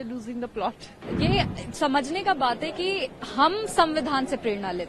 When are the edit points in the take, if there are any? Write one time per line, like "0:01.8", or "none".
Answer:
0:01.0